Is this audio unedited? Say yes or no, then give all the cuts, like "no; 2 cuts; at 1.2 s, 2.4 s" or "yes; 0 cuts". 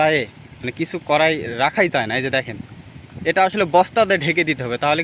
yes; 0 cuts